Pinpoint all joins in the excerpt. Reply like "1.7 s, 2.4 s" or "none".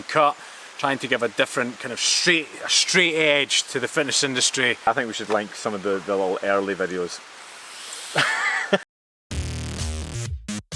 4.9 s, 8.9 s